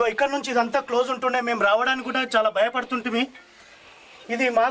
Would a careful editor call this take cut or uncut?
uncut